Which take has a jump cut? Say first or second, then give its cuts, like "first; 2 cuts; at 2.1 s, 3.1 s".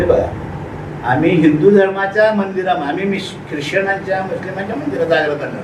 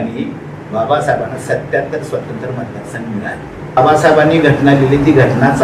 second; 1 cut; at 3.8 s